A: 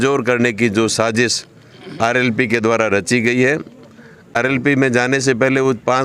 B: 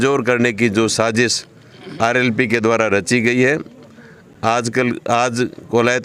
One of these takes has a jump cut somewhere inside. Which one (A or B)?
A